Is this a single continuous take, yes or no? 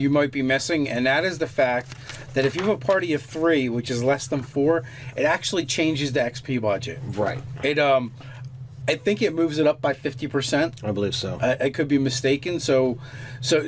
no